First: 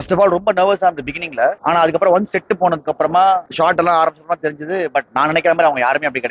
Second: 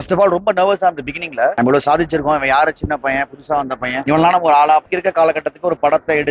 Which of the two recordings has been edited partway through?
second; 2 cuts; at 1.6 s, 4.9 s

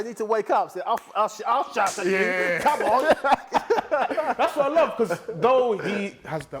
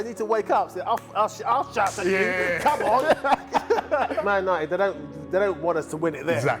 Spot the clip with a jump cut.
second; 1 cut; at 4.2 s

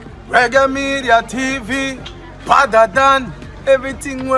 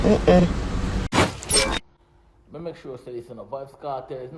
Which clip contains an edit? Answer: second; 1 cut; at 1.8 s

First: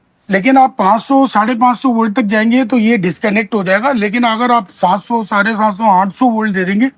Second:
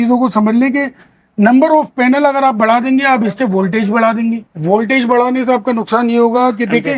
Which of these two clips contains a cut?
second; 1 cut; at 4.5 s

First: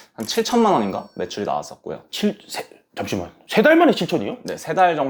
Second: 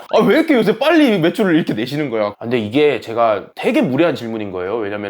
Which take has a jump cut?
second; 1 cut; at 2.4 s

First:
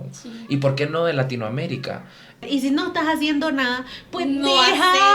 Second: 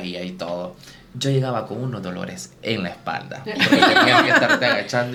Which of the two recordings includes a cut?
first; 1 cut; at 2.4 s

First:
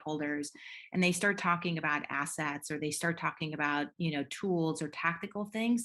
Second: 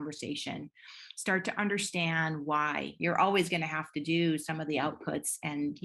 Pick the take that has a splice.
second; 1 cut; at 2.9 s

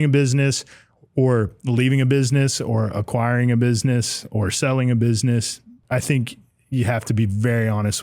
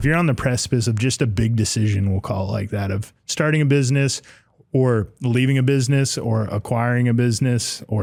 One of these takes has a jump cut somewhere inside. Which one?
first; 1 cut; at 5.8 s

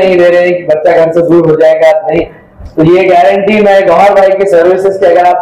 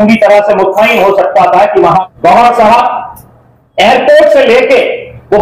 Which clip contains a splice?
second; 1 cut; at 2.0 s

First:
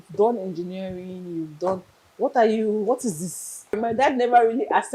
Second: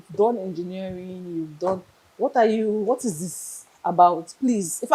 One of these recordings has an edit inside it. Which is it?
first; 1 cut; at 3.8 s

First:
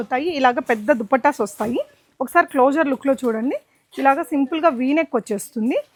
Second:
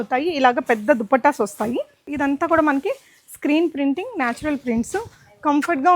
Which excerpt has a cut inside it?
second; 1 cut; at 2.1 s

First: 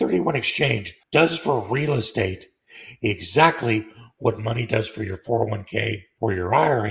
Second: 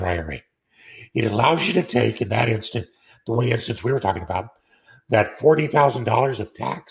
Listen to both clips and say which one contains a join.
first; 2 cuts; at 0.9 s, 6.0 s

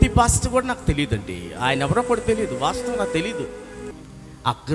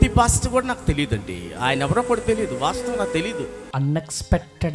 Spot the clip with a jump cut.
first; 1 cut; at 3.6 s

